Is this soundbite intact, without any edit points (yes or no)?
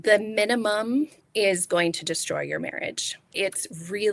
no